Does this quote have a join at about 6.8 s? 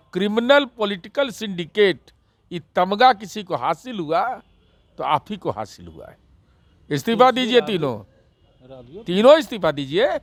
no; 0 cuts

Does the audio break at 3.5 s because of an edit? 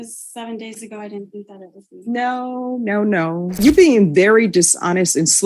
yes; 1 cut; at 3.5 s

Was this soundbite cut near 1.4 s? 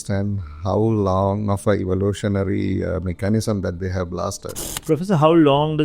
no; 1 cut; at 4.7 s

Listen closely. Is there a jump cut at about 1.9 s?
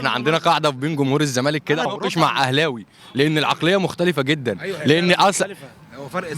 yes; 1 cut; at 1.9 s

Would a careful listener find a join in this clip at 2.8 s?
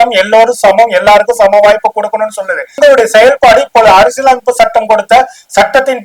yes; 1 cut; at 2.8 s

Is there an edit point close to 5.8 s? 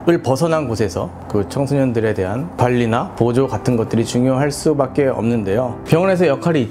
no; 0 cuts

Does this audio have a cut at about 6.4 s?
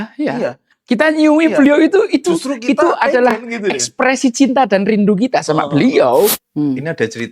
yes; 1 cut; at 6.4 s

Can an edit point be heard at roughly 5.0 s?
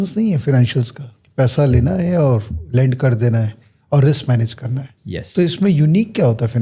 no; 0 cuts

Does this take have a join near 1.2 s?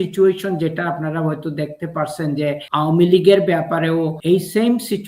no; 2 cuts; at 2.6 s, 4.2 s

